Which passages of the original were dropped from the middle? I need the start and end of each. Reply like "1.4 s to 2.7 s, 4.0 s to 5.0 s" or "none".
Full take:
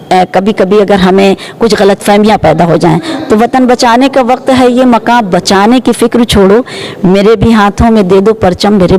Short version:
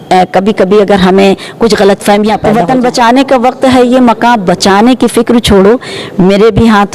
2.4 s to 3.3 s